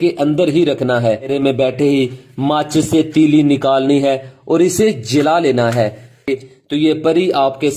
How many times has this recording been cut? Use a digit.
2